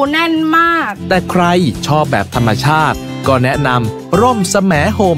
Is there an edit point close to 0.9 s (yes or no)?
yes